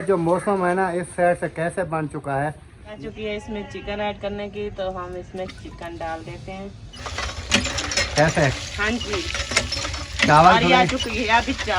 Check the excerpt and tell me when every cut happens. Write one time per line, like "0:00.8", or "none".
0:03.0
0:07.0